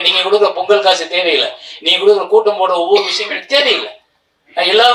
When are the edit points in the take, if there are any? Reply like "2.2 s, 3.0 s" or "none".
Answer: none